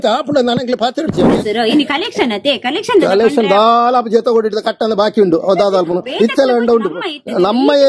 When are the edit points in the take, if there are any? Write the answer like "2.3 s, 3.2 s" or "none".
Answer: 1.4 s